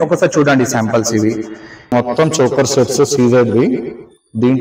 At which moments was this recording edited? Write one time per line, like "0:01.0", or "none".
0:01.9